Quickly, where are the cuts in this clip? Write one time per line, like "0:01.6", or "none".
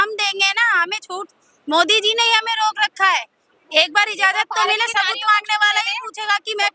none